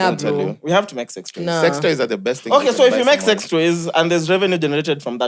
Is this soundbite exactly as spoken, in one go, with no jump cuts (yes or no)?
yes